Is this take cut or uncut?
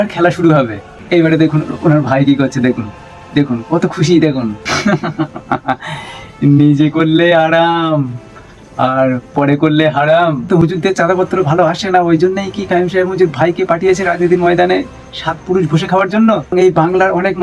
cut